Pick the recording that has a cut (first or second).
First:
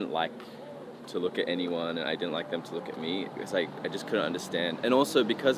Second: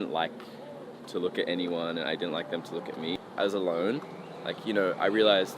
second